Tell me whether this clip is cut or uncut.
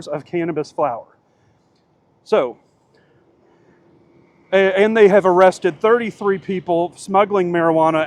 uncut